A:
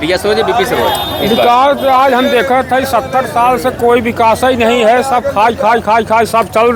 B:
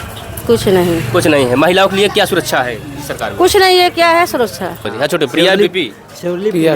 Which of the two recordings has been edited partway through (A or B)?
B